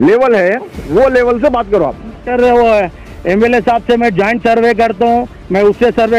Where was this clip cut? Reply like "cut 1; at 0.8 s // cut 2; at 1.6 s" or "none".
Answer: cut 1; at 2.3 s

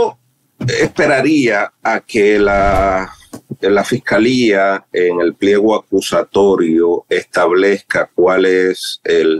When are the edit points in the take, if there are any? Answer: none

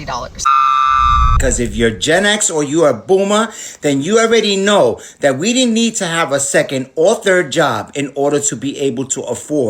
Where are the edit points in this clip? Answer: cut 1; at 1.4 s

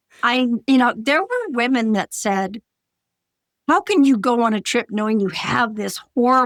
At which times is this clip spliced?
none

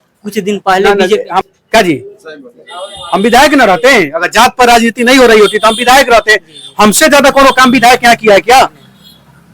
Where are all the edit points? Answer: cut 1; at 1.4 s

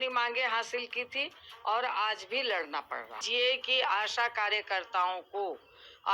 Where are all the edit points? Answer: cut 1; at 3.2 s

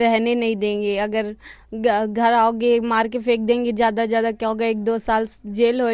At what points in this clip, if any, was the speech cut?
none

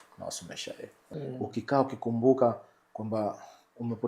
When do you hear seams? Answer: cut 1; at 1.0 s

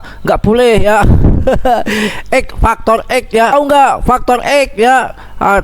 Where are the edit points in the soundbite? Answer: cut 1; at 3.5 s

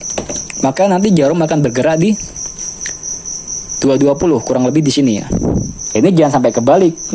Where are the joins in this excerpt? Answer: cut 1; at 5.8 s

